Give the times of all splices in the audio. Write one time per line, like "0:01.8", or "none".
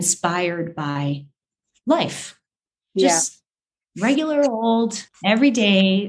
0:05.1